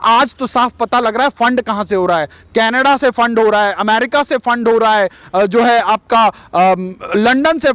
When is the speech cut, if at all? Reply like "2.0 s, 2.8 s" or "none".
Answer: none